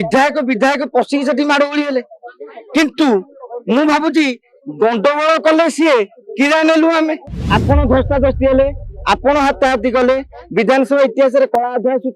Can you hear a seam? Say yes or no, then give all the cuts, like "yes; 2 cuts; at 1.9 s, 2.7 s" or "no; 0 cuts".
yes; 1 cut; at 7.3 s